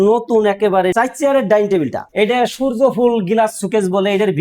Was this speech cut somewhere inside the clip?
yes; 1 cut; at 2.1 s

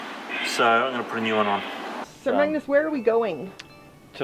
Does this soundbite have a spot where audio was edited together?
yes; 1 cut; at 2.0 s

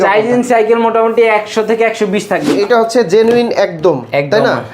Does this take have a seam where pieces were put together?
yes; 1 cut; at 2.5 s

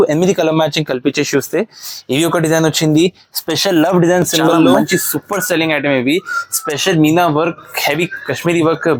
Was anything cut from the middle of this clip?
yes; 1 cut; at 4.8 s

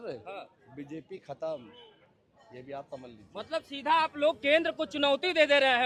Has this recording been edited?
no; 0 cuts

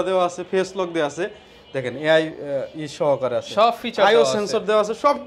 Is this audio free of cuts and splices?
yes; 0 cuts

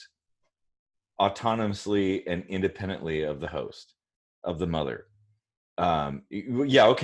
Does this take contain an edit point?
no; 0 cuts

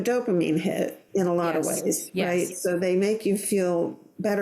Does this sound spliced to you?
yes; 1 cut; at 1.0 s

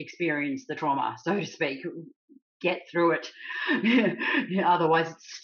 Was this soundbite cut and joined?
no; 0 cuts

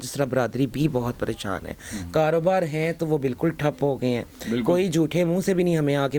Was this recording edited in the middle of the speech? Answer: no; 0 cuts

